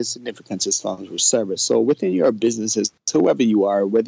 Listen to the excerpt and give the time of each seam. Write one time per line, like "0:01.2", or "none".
none